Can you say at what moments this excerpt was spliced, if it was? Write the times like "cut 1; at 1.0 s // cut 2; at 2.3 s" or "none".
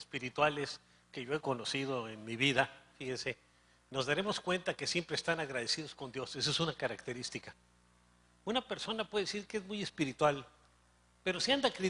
cut 1; at 8.5 s